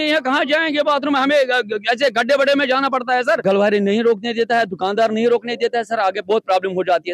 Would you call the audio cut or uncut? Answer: cut